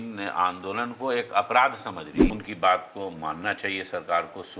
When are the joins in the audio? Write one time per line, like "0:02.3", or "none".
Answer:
0:02.2